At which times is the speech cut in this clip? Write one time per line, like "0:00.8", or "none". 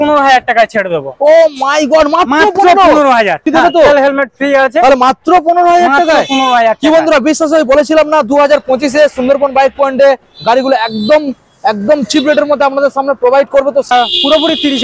0:03.4
0:13.9